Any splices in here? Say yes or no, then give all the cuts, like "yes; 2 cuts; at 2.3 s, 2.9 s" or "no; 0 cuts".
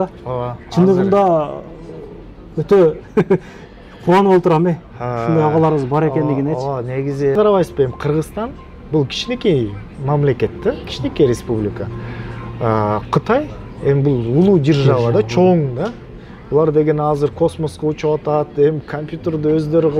yes; 1 cut; at 7.4 s